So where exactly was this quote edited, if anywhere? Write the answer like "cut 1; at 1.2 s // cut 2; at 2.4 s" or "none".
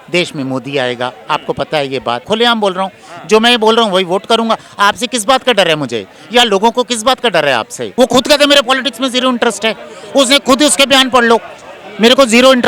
cut 1; at 2.2 s // cut 2; at 7.9 s